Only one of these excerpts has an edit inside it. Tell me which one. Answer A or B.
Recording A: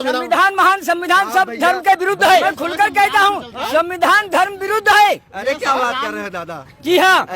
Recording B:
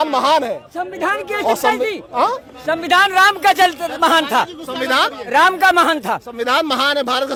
A